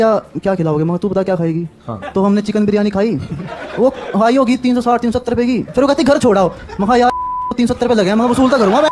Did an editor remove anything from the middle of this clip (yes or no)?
no